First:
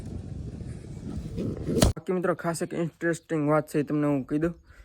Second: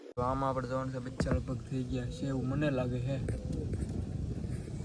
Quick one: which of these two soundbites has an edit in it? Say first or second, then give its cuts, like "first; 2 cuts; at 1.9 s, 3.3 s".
first; 1 cut; at 1.9 s